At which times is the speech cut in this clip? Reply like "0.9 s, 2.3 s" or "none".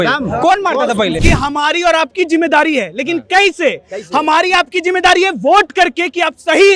1.2 s

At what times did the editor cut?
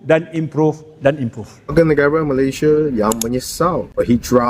1.7 s

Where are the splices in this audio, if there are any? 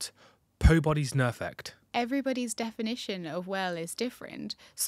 1.8 s

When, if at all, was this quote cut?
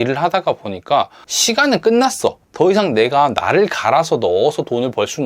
1.2 s, 2.4 s

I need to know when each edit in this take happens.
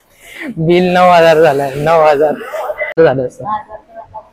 3.0 s

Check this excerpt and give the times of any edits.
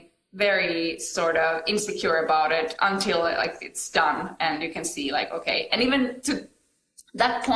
none

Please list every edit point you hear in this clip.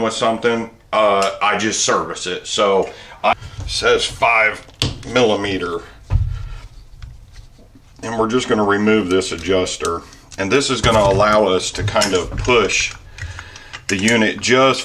3.3 s

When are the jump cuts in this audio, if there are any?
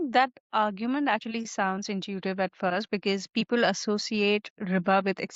none

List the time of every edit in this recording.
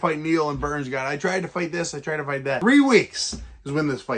2.6 s

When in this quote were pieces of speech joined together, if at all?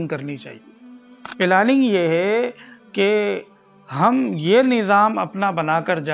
1.2 s

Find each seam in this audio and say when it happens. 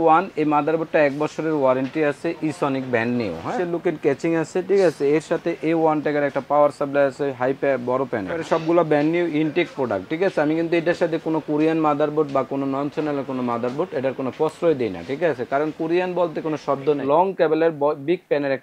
3.5 s, 8.4 s, 17.0 s

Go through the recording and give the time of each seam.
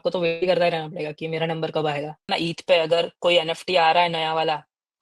2.3 s

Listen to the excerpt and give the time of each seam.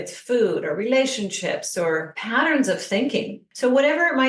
2.2 s, 3.4 s

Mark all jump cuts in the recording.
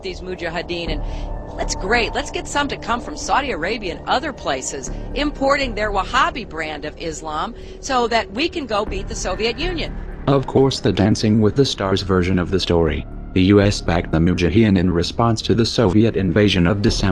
10.8 s

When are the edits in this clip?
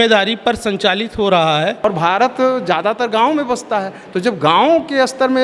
1.8 s

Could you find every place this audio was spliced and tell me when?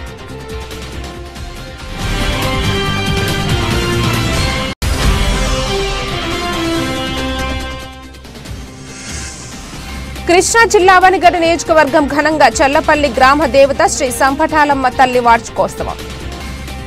10.3 s, 16.0 s

